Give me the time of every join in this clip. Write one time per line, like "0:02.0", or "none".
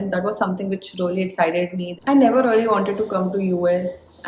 0:01.9